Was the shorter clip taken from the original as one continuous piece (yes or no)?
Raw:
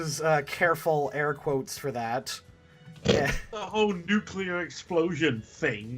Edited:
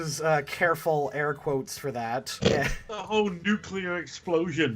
no